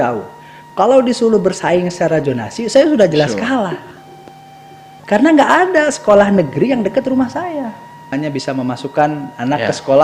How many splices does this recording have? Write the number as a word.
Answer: one